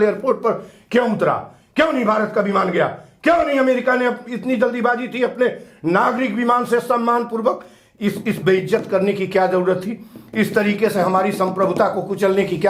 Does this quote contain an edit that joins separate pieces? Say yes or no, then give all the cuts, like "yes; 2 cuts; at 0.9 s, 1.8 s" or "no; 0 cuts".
no; 0 cuts